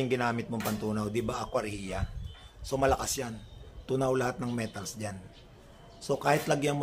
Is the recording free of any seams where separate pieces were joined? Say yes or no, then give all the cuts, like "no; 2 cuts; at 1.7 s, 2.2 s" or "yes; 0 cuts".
yes; 0 cuts